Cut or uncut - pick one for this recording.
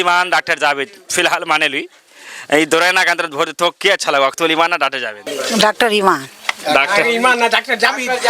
cut